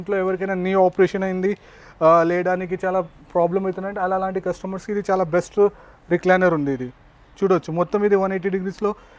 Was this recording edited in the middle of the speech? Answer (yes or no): no